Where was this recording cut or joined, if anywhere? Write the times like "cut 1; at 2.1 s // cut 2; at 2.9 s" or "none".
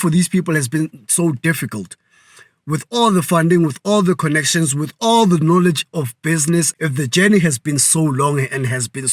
cut 1; at 6.7 s